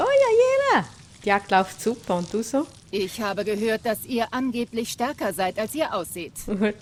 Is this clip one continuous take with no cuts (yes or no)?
yes